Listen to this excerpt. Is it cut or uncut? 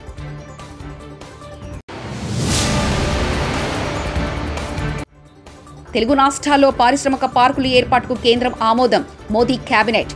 uncut